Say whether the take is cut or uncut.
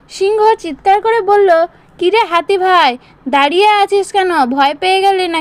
uncut